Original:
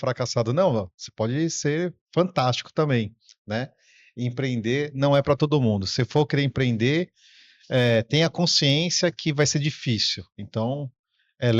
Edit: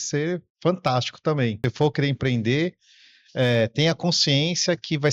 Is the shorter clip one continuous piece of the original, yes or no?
no